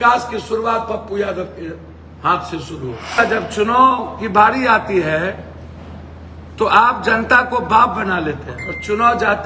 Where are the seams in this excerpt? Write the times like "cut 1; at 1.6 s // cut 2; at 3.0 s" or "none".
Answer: cut 1; at 3.2 s

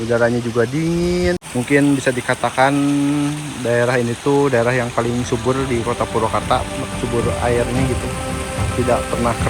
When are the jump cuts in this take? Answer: cut 1; at 1.4 s

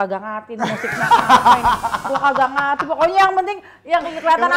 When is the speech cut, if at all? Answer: none

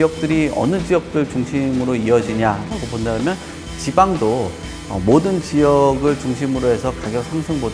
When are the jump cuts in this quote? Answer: none

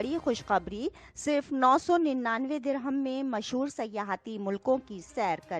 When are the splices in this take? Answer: none

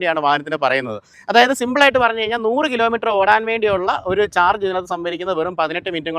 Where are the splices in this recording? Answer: cut 1; at 1.1 s

